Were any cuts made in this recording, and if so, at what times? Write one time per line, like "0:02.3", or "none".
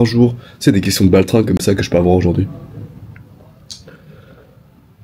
none